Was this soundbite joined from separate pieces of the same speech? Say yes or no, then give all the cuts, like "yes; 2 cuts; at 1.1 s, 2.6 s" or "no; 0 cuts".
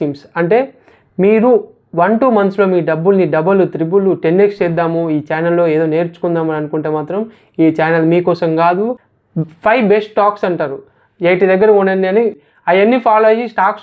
yes; 2 cuts; at 9.1 s, 12.4 s